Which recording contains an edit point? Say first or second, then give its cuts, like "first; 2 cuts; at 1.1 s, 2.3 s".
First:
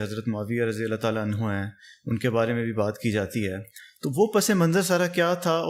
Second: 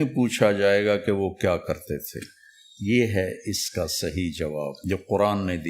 second; 1 cut; at 4.8 s